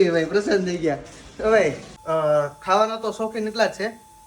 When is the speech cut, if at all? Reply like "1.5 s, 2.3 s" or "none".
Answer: 1.9 s